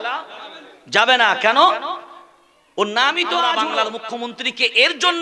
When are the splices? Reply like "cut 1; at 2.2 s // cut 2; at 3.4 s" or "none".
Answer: cut 1; at 3.6 s